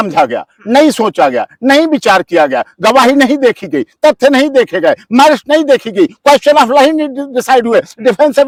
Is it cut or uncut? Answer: uncut